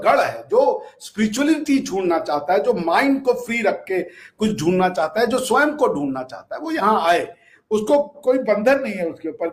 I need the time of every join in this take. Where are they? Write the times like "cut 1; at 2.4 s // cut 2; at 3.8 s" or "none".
none